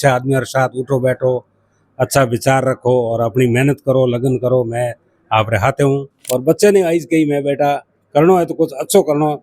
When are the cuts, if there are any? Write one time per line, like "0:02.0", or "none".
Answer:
0:06.1